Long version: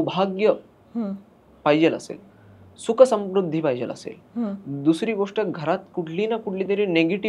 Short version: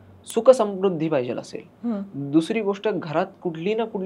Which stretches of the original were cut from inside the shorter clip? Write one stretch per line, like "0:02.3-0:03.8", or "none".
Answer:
none